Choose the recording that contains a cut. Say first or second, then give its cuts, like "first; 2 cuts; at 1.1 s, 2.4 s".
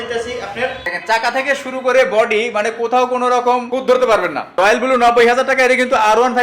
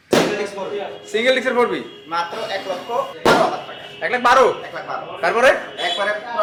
first; 2 cuts; at 1.0 s, 4.5 s